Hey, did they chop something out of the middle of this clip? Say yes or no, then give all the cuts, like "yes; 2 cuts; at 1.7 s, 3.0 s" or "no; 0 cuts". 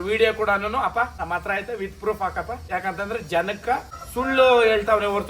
yes; 3 cuts; at 1.2 s, 2.6 s, 4.0 s